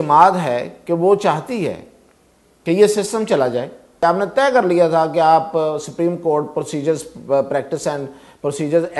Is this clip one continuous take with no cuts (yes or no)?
no